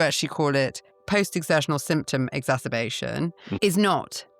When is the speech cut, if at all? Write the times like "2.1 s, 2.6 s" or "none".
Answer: 0.9 s, 3.5 s